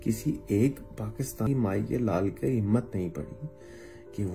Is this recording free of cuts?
no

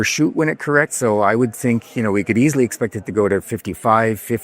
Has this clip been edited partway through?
no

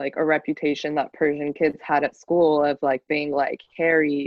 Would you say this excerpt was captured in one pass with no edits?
yes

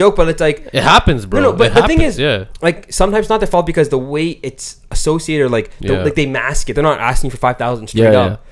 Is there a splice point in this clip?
no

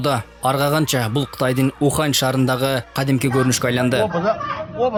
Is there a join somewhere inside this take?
no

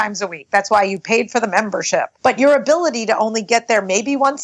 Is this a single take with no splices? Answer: no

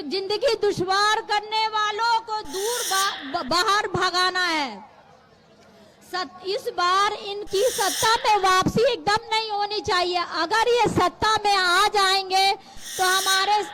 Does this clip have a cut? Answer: no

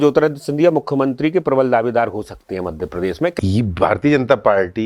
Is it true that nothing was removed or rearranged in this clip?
no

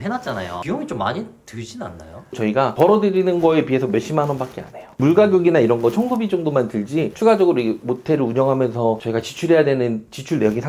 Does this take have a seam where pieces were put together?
yes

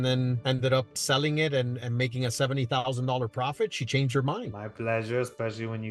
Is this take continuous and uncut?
no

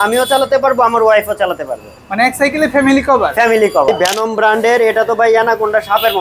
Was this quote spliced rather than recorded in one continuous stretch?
yes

